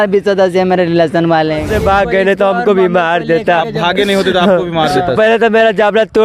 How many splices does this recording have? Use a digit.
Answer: 1